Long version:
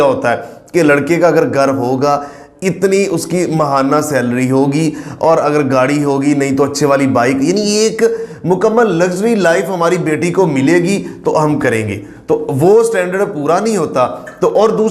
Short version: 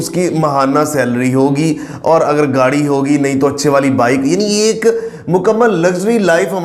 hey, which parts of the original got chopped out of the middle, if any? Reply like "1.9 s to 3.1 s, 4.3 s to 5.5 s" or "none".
none

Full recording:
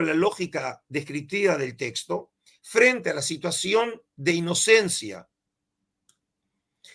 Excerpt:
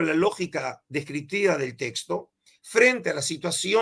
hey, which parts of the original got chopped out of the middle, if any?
none

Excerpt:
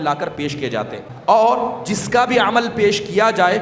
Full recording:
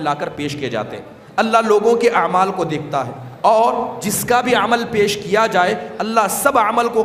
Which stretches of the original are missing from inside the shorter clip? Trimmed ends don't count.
1.1 s to 3.2 s

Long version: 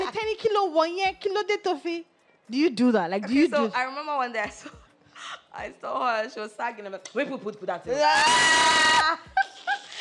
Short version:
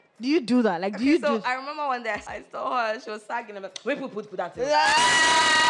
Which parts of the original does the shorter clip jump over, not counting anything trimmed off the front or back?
4.6 s to 5.6 s

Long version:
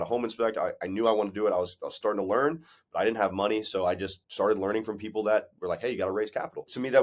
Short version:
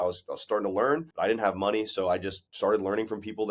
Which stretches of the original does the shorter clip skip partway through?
2.6 s to 2.9 s

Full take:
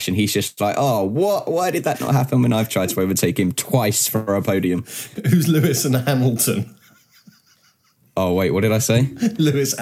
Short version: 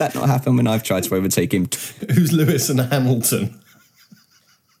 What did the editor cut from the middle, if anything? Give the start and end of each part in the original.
3.6 s to 4.9 s

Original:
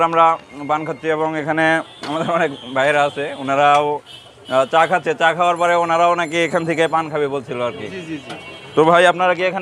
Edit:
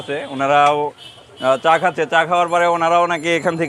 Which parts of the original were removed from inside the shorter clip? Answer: none

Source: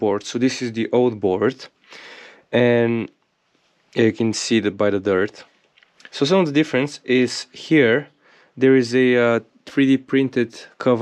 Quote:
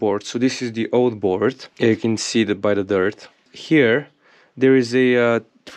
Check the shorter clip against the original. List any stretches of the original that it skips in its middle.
1.7 s to 3.8 s, 5.6 s to 7.5 s

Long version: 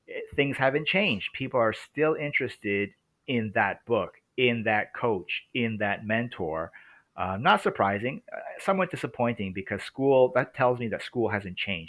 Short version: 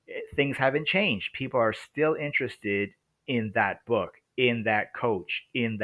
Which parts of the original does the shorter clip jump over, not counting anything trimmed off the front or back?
none

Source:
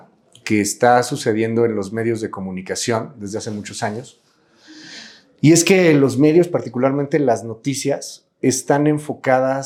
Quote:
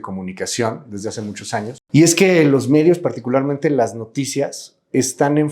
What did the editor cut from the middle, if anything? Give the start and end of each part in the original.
4.1 s to 5.3 s

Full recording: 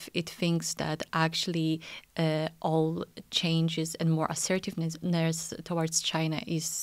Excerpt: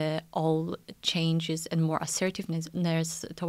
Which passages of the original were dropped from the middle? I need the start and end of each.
none

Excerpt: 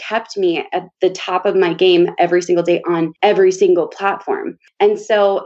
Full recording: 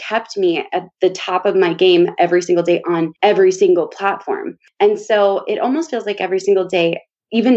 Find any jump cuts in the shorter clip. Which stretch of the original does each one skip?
none

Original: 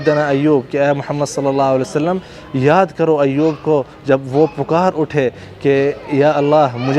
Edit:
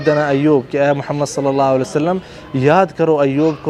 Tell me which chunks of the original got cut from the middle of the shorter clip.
none

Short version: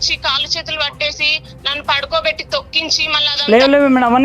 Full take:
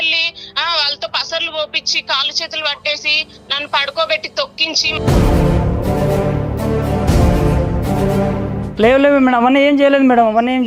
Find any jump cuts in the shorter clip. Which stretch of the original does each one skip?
5.0 s to 8.4 s

